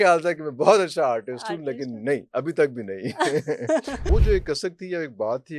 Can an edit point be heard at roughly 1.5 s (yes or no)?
no